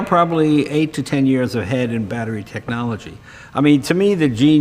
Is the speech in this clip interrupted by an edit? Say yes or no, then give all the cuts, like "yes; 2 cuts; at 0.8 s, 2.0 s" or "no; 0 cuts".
yes; 1 cut; at 3.2 s